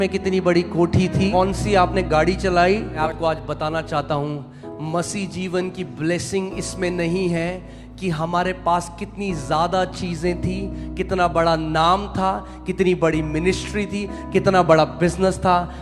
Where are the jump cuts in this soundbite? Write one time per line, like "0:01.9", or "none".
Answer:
0:01.3
0:03.0